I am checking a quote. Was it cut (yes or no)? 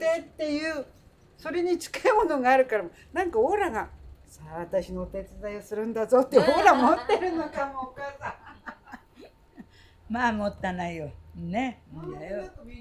no